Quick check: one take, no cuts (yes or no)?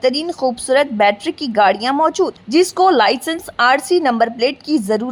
yes